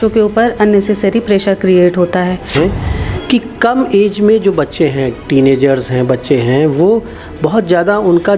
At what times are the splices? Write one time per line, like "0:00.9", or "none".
0:02.5